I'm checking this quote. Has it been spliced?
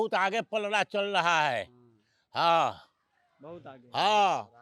no; 0 cuts

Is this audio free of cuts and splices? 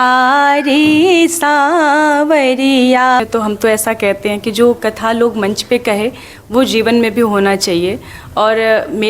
no; 1 cut; at 3.2 s

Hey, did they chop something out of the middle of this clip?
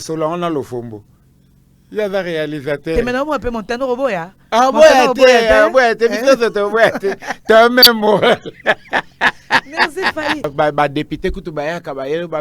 yes; 1 cut; at 10.5 s

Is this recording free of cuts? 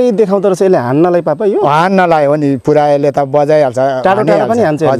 yes; 0 cuts

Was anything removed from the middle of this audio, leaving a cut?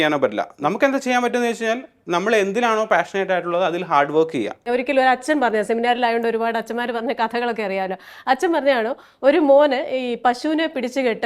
yes; 1 cut; at 4.7 s

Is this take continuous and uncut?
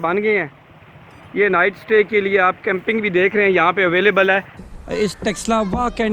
no; 1 cut; at 4.6 s

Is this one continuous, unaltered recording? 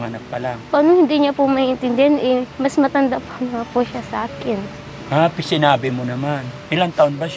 yes; 0 cuts

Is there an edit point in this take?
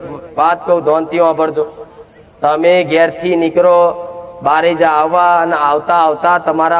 no; 0 cuts

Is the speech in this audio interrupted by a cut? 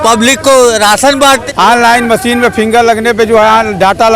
yes; 1 cut; at 1.4 s

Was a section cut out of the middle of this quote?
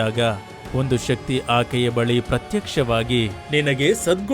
yes; 1 cut; at 3.3 s

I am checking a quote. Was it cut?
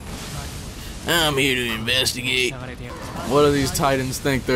yes; 1 cut; at 2.9 s

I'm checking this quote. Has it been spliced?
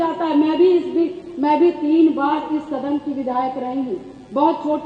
no; 0 cuts

